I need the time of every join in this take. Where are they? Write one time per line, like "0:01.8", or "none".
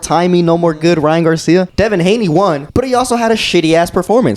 0:01.7
0:02.6